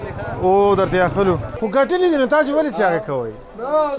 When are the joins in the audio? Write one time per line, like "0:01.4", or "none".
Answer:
0:01.5